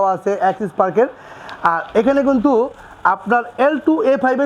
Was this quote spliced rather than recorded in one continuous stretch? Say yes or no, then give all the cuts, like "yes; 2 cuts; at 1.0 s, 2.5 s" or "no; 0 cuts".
no; 0 cuts